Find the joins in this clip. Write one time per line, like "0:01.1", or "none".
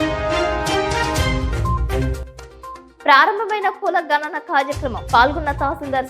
0:02.2